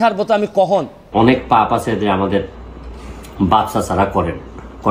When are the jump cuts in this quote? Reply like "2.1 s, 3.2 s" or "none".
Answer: 1.0 s